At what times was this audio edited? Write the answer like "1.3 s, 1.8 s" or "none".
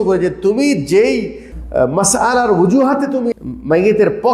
1.5 s, 3.3 s